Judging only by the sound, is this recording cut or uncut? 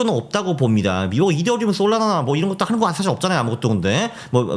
uncut